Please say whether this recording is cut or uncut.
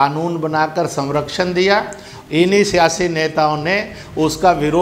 cut